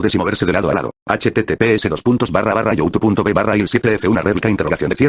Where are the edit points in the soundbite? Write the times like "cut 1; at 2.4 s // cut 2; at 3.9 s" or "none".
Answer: cut 1; at 1.0 s // cut 2; at 3.4 s